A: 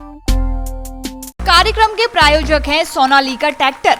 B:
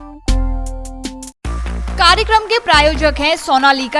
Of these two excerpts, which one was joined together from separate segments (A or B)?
A